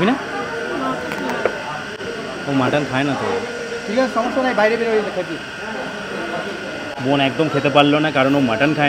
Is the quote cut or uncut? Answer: uncut